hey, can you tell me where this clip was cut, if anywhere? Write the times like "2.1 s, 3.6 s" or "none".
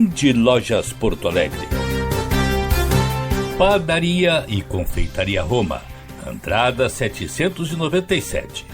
1.6 s, 3.5 s